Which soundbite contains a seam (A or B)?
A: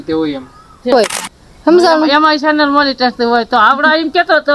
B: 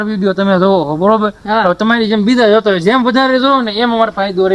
A